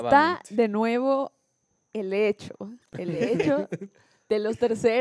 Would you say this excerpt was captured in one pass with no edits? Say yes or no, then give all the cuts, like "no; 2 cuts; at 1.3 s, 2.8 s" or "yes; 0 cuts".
yes; 0 cuts